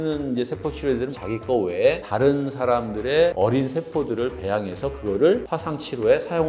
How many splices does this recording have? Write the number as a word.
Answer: one